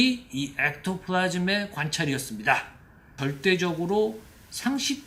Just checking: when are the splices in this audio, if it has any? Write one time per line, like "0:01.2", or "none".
0:03.2